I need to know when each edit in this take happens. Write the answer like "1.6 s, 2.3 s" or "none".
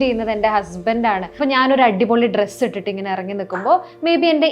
1.4 s